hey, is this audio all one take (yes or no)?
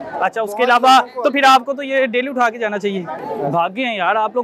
no